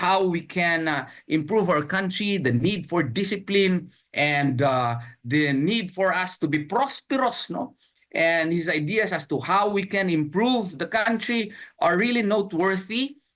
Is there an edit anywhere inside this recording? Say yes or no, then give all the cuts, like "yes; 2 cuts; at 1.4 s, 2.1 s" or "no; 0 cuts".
no; 0 cuts